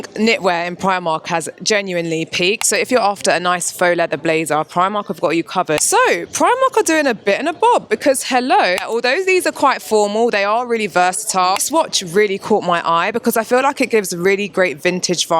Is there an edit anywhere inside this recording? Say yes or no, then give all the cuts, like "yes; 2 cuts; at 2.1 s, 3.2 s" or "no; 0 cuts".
yes; 4 cuts; at 2.6 s, 5.8 s, 8.8 s, 11.6 s